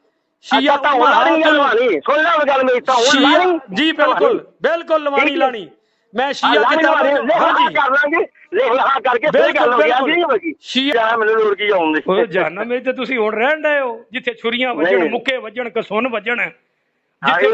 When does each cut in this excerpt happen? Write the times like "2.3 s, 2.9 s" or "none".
10.9 s